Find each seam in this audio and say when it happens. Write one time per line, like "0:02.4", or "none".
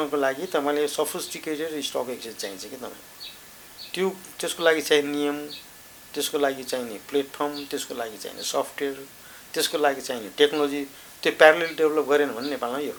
none